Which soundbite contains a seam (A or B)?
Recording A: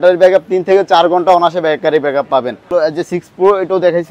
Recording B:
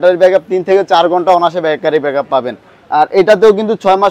A